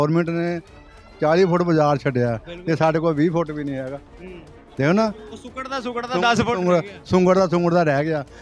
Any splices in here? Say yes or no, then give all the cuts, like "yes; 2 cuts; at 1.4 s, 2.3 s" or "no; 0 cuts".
no; 0 cuts